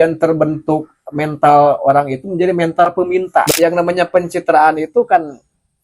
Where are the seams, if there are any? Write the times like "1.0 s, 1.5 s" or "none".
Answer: 3.5 s